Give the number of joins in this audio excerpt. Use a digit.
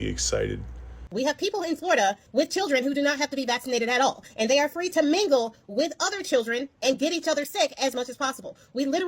1